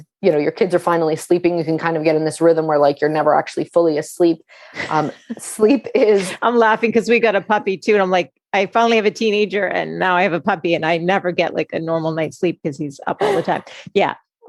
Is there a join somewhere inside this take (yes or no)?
no